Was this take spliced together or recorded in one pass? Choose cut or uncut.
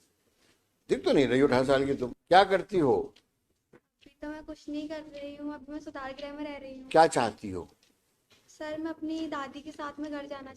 cut